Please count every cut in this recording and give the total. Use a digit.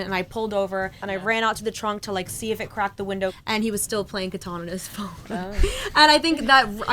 2